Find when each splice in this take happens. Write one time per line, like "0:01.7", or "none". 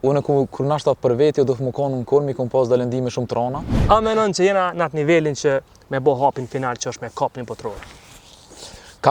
0:03.7